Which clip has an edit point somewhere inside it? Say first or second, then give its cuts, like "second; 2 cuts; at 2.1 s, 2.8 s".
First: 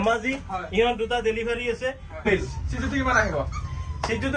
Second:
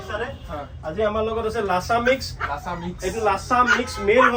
first; 1 cut; at 2.2 s